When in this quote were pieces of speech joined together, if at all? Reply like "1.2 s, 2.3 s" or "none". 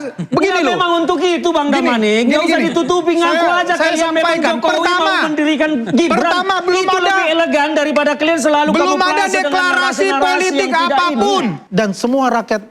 11.6 s